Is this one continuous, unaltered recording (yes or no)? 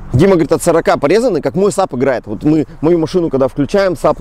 yes